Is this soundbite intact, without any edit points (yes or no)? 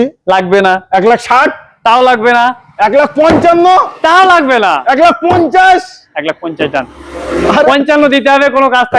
no